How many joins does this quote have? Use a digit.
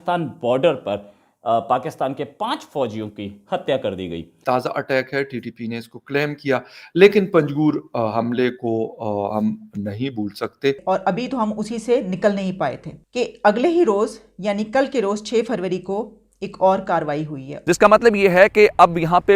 3